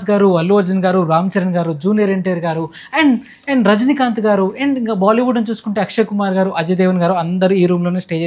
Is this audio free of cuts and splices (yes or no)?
yes